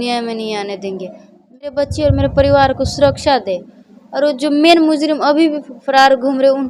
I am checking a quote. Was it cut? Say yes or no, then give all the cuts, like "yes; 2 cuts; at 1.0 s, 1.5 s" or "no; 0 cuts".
yes; 1 cut; at 1.7 s